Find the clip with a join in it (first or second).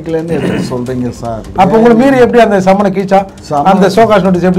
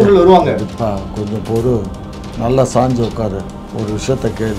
second